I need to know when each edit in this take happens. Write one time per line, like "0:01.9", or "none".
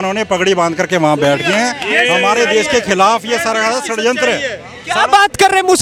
none